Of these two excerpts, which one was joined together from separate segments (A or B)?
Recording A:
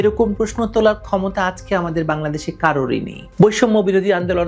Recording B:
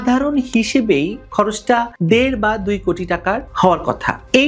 A